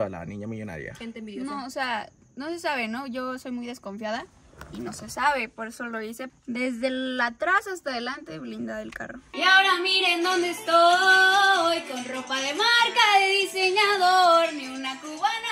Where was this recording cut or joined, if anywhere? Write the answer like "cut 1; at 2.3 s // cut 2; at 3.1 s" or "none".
cut 1; at 6.3 s // cut 2; at 9.3 s